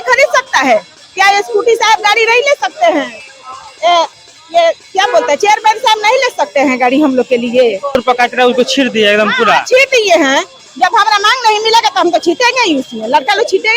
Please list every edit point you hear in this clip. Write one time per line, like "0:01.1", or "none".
0:08.0